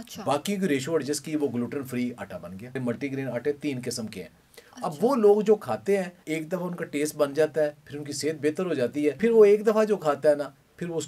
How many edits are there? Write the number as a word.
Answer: three